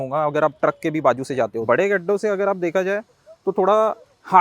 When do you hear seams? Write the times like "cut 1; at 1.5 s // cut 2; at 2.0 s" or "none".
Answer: cut 1; at 1.6 s